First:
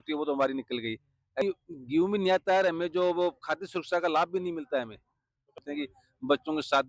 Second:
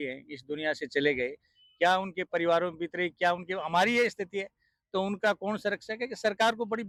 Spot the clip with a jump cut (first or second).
first